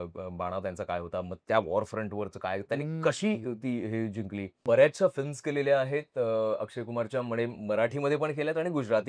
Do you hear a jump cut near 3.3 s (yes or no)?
no